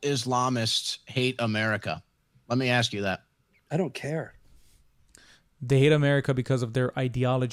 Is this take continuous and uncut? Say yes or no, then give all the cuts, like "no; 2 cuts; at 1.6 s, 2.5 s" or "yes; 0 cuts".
yes; 0 cuts